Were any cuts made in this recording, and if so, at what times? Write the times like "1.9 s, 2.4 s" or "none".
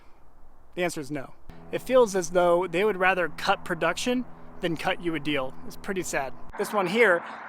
1.4 s, 6.4 s